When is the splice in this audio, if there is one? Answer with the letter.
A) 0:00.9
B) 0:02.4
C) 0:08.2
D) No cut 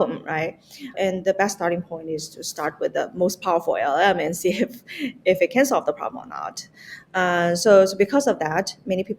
A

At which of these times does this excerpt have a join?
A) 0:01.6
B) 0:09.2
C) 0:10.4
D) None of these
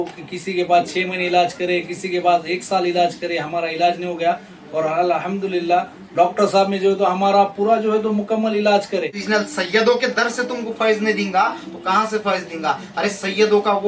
B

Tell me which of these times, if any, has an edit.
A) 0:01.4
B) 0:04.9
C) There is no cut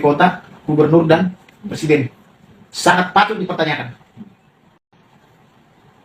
B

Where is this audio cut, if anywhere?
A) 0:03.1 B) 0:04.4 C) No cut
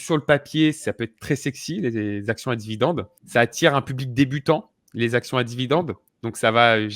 A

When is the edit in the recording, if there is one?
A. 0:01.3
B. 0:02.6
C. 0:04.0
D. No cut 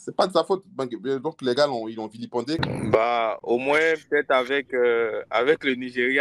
B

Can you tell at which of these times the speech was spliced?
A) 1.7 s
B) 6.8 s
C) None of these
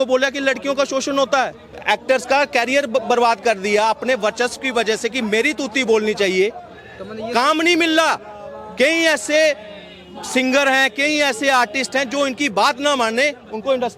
A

